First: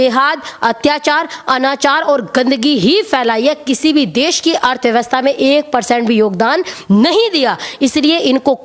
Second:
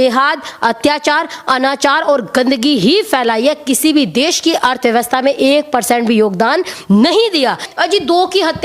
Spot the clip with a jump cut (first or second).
second